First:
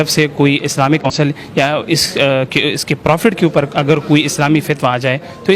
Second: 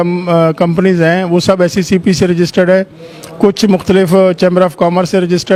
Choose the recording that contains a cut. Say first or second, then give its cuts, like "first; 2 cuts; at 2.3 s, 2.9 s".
first; 1 cut; at 1.1 s